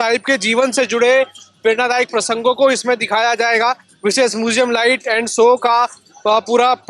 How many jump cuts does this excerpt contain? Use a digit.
0